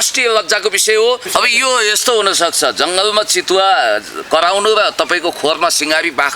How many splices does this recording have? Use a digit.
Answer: 1